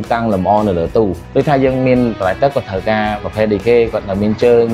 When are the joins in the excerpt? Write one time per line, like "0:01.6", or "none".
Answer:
0:01.2